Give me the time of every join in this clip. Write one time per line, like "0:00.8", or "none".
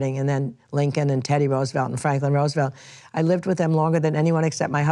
none